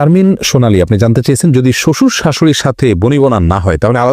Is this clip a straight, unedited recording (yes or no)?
yes